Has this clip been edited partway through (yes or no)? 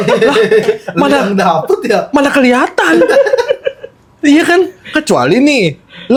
no